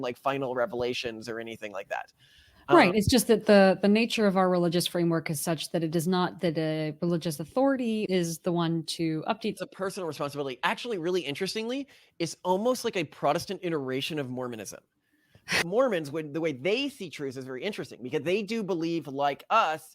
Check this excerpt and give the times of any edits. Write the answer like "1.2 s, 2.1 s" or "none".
8.1 s, 9.6 s, 15.6 s